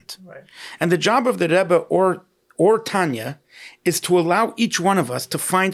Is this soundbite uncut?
yes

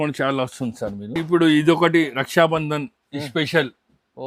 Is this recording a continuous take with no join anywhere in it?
no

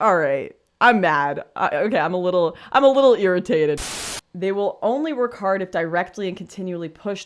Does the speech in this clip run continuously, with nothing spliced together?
no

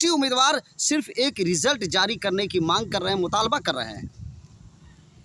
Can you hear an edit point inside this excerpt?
no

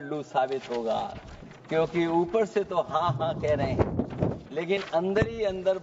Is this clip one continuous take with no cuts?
yes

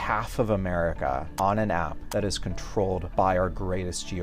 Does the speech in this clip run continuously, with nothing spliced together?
no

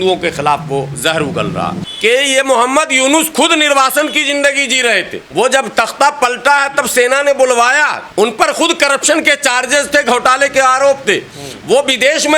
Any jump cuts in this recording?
yes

